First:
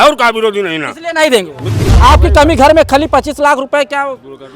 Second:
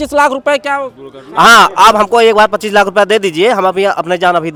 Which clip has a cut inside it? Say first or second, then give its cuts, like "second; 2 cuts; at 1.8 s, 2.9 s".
first; 1 cut; at 1.9 s